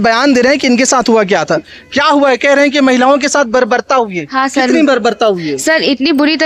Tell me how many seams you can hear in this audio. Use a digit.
0